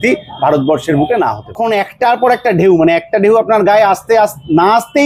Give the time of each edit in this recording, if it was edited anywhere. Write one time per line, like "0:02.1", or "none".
0:01.6